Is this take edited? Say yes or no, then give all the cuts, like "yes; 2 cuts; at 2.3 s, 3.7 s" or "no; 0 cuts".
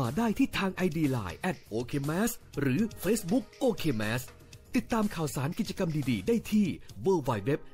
no; 0 cuts